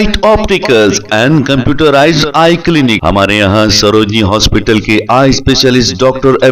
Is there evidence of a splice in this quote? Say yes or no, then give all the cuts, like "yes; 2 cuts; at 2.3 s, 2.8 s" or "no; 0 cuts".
no; 0 cuts